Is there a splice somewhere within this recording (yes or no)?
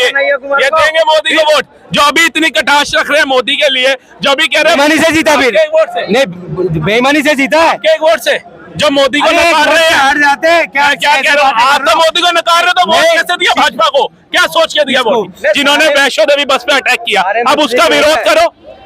yes